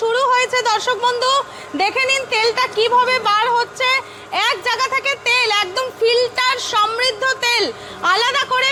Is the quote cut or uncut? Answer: uncut